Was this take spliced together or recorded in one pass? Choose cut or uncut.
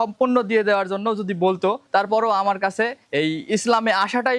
cut